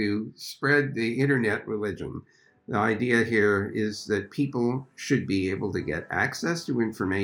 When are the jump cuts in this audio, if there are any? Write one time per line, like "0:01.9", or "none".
none